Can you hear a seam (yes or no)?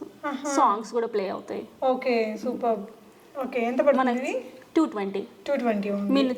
no